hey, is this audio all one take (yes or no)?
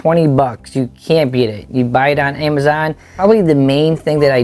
no